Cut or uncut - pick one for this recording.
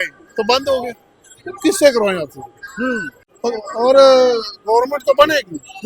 cut